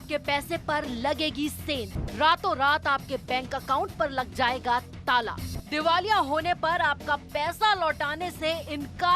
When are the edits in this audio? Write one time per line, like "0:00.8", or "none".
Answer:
0:01.9
0:05.5